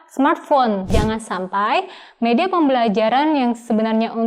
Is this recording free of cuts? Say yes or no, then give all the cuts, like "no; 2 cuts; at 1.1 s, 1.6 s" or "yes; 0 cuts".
no; 1 cut; at 0.9 s